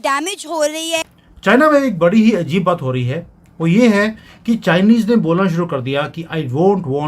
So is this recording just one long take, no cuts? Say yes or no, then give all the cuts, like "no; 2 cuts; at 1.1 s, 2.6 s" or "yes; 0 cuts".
no; 1 cut; at 1.1 s